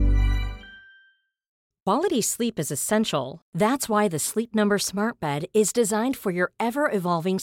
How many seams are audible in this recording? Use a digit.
1